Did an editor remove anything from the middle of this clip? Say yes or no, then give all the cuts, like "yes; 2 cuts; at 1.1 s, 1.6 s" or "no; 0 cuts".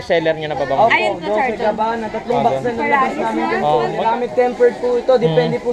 yes; 1 cut; at 4.0 s